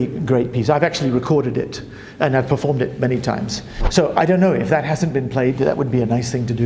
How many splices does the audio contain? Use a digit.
1